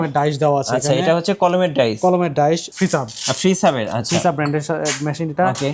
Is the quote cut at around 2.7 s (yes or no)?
yes